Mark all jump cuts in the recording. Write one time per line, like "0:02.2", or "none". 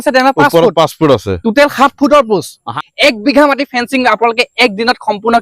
0:02.8